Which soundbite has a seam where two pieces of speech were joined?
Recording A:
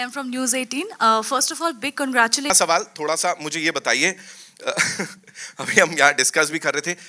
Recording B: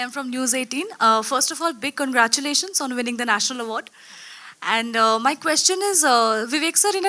A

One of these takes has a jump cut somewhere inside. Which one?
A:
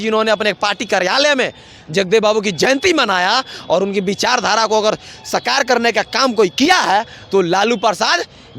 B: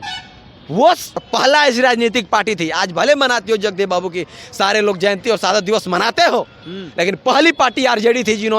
B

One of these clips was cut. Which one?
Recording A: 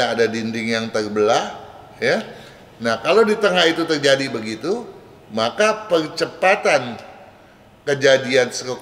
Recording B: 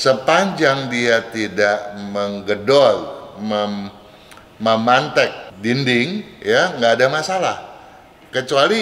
B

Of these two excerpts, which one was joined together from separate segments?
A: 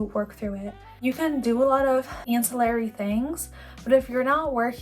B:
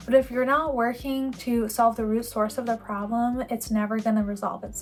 A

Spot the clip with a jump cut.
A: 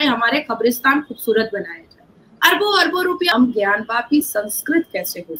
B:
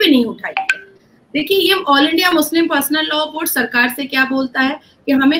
A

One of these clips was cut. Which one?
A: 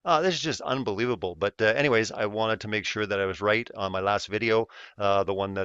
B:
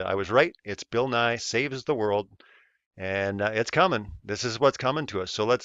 A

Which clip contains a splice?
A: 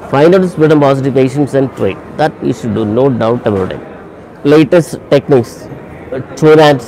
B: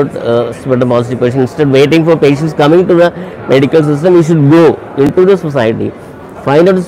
A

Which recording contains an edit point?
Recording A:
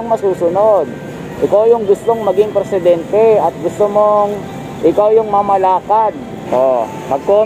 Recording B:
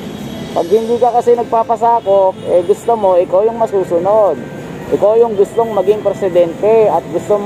A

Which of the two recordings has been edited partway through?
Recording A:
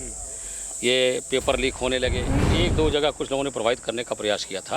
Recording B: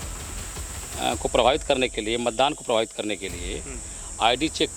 A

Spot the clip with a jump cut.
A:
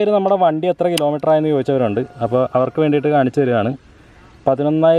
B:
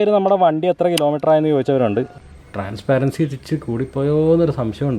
B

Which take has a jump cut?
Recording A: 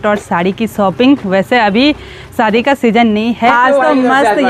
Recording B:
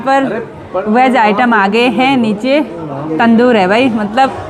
A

